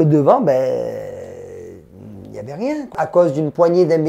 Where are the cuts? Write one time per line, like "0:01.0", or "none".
0:02.9